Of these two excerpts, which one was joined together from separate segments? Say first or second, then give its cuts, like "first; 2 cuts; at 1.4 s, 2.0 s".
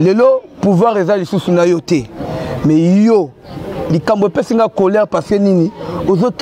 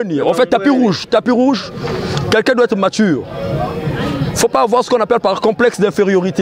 second; 1 cut; at 1.0 s